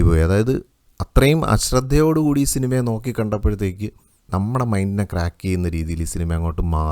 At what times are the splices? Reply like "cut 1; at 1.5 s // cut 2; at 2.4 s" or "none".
none